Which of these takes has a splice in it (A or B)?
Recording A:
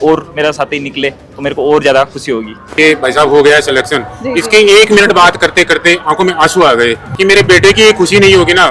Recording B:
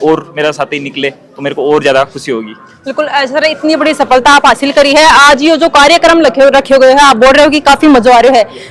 A